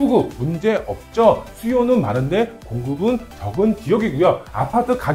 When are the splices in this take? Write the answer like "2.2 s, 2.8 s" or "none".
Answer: none